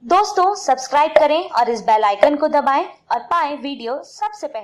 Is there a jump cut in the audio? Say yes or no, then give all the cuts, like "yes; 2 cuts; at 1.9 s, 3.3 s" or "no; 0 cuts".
no; 0 cuts